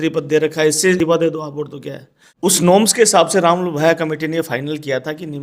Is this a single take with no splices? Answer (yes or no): no